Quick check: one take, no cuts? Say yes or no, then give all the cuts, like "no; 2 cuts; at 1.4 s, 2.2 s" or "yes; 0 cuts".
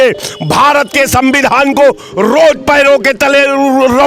yes; 0 cuts